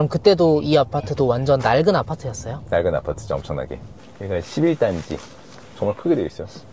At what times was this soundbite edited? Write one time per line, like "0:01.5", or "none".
0:03.9